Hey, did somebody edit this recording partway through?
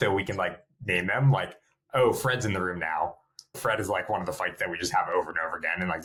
no; 0 cuts

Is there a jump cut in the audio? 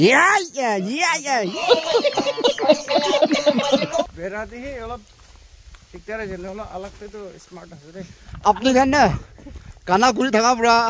yes; 3 cuts; at 1.0 s, 3.9 s, 8.4 s

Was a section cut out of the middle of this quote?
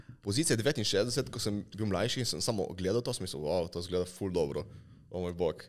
no; 0 cuts

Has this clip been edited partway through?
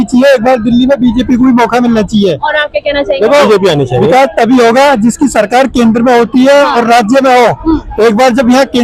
no; 0 cuts

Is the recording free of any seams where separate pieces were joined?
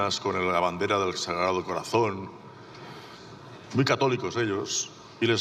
yes; 0 cuts

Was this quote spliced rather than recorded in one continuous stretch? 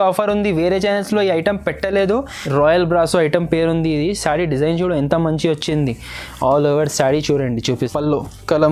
yes; 2 cuts; at 2.4 s, 7.8 s

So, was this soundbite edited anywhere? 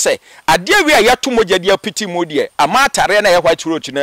no; 0 cuts

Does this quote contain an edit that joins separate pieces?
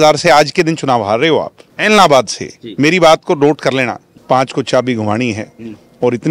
yes; 2 cuts; at 1.6 s, 4.1 s

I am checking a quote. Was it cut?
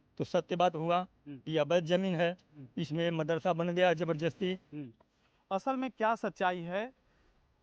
yes; 1 cut; at 4.8 s

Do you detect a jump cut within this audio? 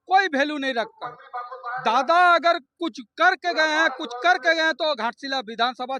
no; 0 cuts

